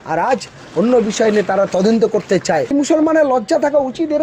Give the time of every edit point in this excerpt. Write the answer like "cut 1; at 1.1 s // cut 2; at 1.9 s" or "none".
cut 1; at 2.7 s